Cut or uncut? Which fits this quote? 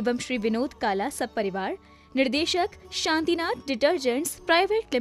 uncut